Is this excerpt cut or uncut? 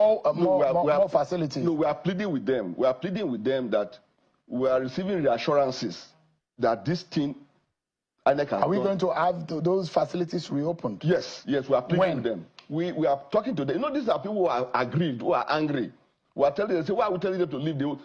uncut